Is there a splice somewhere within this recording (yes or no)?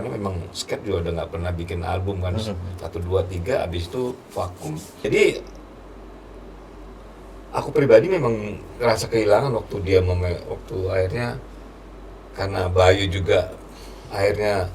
yes